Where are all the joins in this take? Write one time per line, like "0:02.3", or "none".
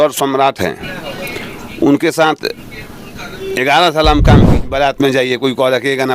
0:04.6